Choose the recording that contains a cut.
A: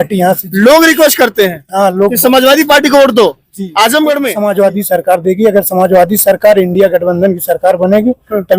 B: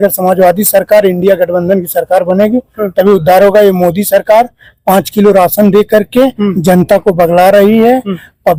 A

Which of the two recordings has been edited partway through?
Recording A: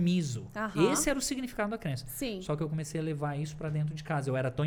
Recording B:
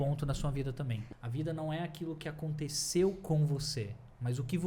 B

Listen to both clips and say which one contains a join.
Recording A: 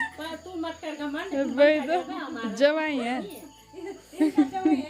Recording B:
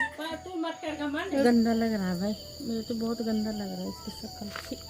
B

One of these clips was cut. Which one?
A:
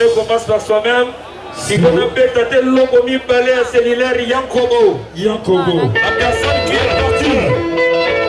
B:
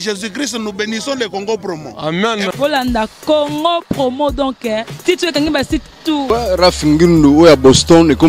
B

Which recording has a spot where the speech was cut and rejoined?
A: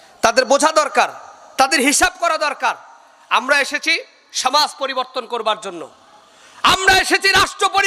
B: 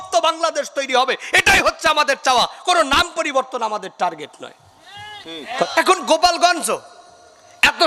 B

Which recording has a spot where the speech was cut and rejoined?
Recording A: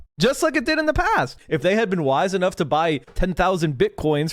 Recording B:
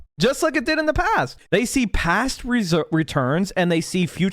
B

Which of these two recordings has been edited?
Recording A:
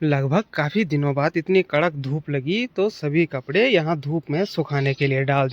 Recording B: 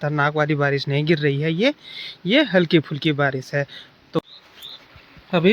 B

